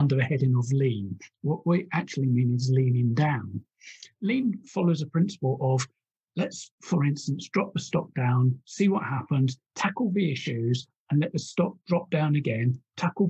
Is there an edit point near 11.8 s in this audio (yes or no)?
no